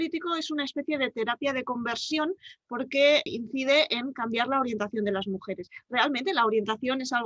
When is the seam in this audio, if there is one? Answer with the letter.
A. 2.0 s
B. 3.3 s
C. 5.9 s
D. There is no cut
B